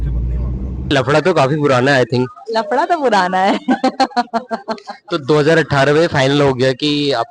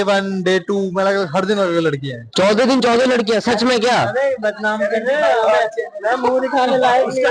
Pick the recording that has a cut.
first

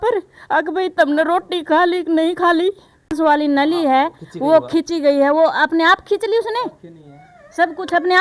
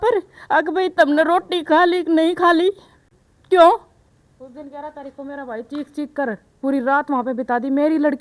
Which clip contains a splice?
first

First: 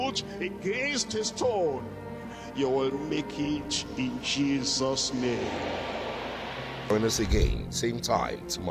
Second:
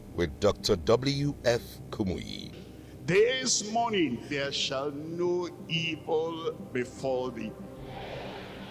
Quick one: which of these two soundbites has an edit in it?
second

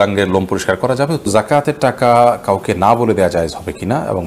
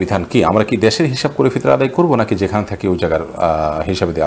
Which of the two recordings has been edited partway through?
first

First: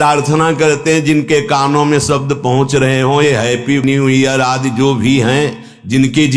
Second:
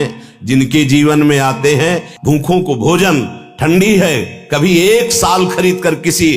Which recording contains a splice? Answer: second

